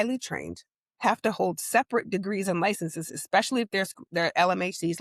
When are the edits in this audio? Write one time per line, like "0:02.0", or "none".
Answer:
none

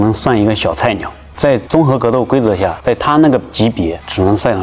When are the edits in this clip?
none

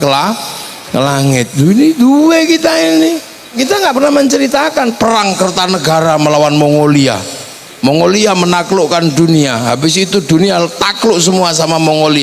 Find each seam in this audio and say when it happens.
0:03.6

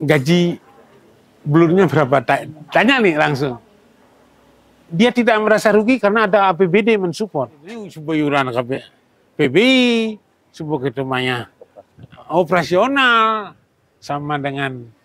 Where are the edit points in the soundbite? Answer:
0:07.9

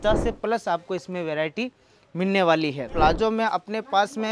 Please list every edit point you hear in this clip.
none

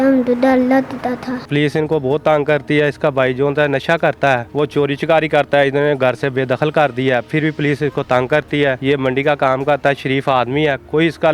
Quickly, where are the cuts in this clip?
0:01.5
0:04.5
0:08.8

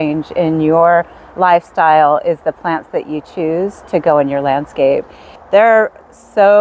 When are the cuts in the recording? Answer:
0:05.4

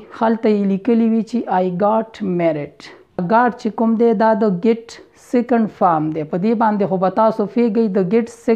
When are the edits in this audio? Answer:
0:03.2

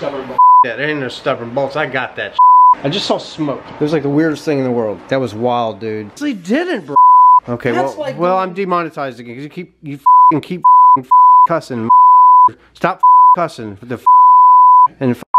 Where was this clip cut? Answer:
0:02.8
0:04.9
0:06.1

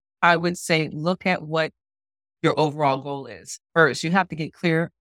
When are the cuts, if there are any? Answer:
none

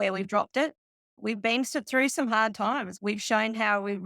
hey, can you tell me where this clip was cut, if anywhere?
0:01.1
0:02.9

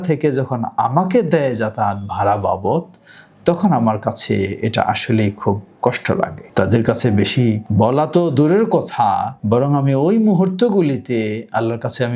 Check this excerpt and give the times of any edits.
0:06.4
0:07.6
0:09.3

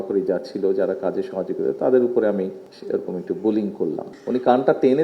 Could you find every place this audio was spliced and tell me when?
0:02.7
0:04.1

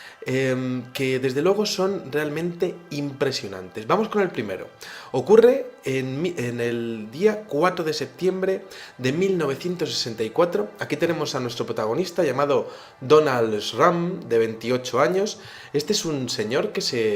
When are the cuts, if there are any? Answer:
0:04.3

